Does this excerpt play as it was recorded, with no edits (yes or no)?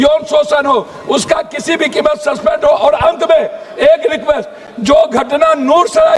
yes